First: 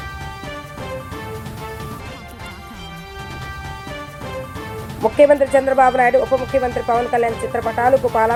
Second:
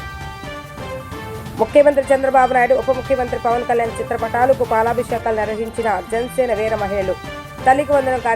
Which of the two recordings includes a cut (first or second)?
second